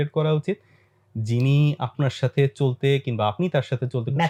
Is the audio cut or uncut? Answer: uncut